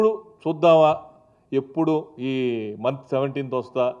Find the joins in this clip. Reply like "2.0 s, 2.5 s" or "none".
none